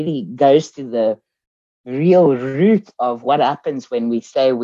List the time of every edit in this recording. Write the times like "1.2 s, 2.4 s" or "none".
none

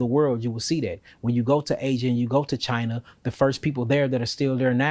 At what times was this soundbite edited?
none

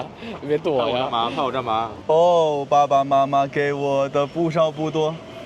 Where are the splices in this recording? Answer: 1.9 s

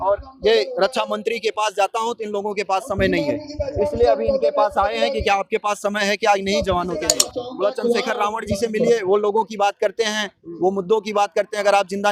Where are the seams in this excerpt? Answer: 7.2 s

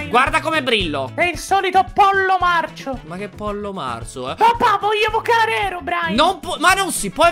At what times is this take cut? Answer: 1.1 s

